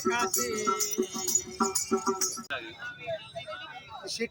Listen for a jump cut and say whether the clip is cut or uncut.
cut